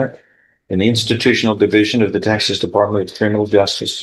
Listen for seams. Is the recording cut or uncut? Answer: uncut